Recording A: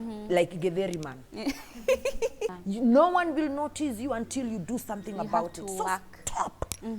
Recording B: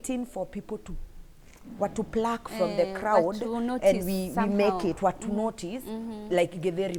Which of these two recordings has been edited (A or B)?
A